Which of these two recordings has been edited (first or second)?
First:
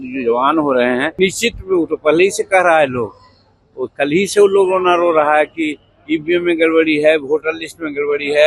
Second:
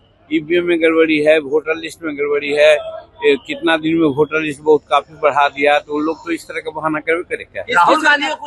first